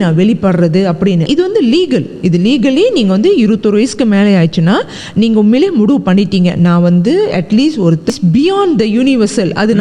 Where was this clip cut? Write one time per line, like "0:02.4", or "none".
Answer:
0:01.3
0:08.1

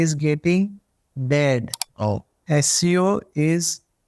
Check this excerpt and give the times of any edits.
0:01.8

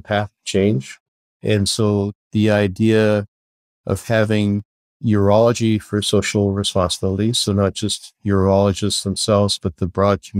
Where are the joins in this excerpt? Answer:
none

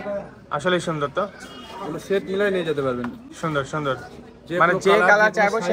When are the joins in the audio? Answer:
none

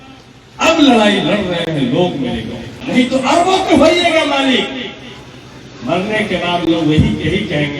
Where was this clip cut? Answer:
0:02.7

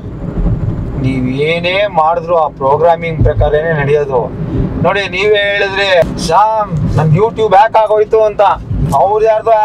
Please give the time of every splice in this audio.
0:06.0
0:08.7

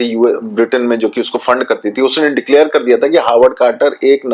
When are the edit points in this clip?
none

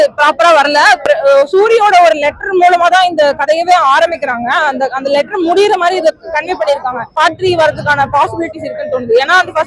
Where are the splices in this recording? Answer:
0:01.1
0:07.1

